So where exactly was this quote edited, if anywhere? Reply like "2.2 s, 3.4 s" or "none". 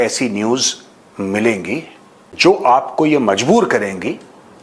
none